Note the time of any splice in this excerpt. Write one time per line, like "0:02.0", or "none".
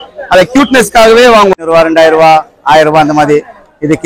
0:01.6